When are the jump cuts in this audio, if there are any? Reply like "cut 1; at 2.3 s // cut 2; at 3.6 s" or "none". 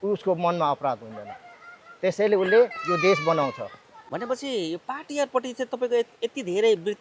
none